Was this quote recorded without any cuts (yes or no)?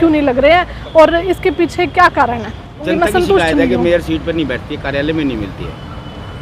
no